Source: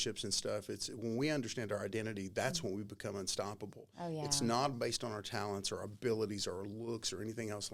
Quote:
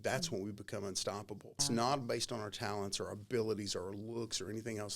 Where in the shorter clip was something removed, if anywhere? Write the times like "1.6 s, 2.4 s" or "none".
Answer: 1.6 s